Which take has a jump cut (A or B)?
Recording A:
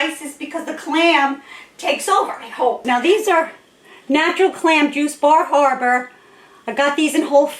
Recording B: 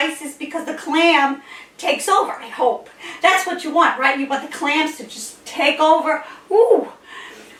A